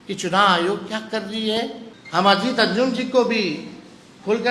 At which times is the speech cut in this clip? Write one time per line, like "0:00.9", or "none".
0:01.9